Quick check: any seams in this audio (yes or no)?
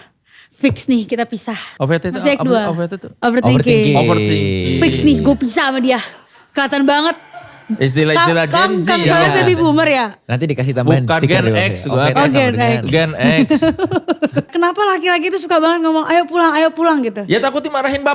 yes